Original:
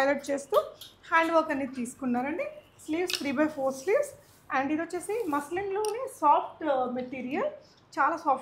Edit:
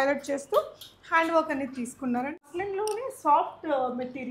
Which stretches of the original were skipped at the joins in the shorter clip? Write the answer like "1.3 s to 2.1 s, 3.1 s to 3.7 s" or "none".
2.5 s to 5.4 s